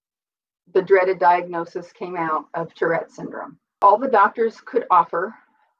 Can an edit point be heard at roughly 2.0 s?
no; 1 cut; at 3.8 s

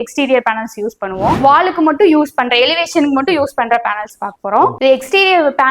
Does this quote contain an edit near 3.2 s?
no; 2 cuts; at 1.4 s, 4.8 s

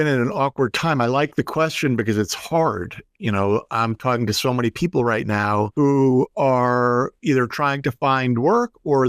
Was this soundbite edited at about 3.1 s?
no; 1 cut; at 5.7 s

